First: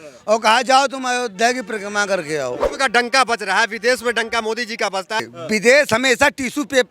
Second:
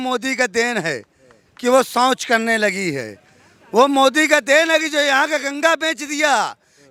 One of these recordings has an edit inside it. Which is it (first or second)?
first